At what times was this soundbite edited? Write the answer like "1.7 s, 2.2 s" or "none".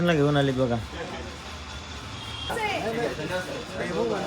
2.5 s